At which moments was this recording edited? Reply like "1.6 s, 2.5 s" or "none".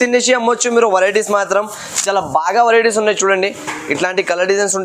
none